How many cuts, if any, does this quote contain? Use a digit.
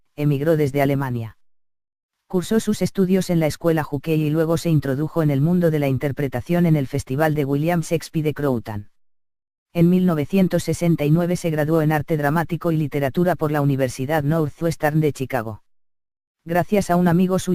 0